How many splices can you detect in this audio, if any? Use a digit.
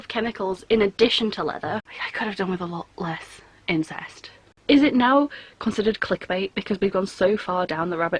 2